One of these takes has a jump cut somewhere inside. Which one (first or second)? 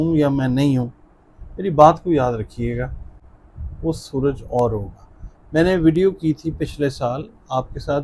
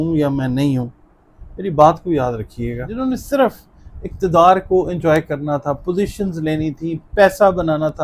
second